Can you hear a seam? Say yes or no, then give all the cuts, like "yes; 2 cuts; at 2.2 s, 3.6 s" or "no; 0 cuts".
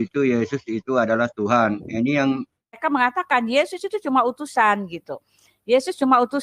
yes; 1 cut; at 2.8 s